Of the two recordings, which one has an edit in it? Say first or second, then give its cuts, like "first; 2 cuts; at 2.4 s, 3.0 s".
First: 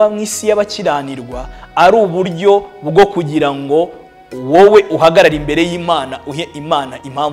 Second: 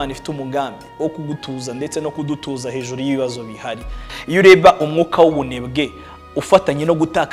second; 1 cut; at 4.1 s